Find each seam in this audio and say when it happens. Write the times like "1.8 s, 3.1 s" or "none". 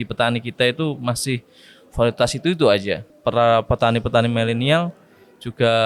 3.0 s